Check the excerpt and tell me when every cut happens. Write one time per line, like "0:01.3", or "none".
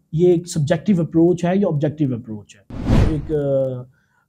0:03.0